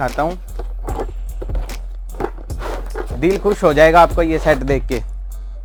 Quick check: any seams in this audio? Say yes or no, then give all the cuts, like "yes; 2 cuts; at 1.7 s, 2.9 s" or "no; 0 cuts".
no; 0 cuts